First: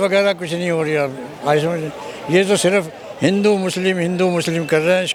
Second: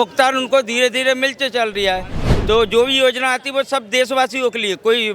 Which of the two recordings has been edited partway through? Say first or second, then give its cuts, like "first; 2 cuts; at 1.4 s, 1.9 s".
second; 1 cut; at 2.2 s